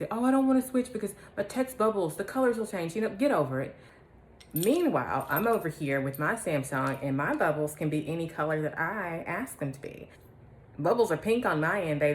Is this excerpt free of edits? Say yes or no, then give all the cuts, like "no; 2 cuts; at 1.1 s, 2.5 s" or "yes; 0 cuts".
no; 2 cuts; at 3.9 s, 10.2 s